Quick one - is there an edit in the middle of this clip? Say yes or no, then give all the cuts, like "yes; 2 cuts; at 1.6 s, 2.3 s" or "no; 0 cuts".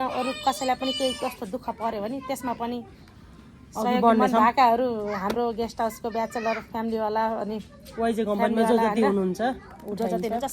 no; 0 cuts